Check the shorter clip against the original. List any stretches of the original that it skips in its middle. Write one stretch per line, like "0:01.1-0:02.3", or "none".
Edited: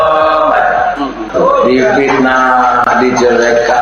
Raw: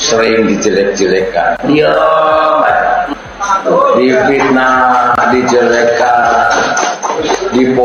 0:03.3-0:03.5